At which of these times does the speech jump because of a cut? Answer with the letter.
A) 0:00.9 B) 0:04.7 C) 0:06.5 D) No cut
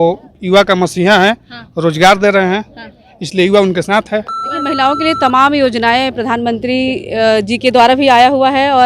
B